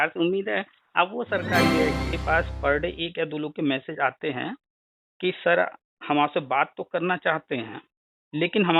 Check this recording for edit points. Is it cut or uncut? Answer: cut